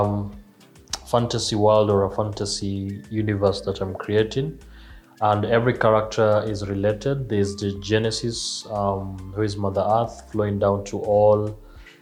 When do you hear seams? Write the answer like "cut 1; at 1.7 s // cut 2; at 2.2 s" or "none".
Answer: none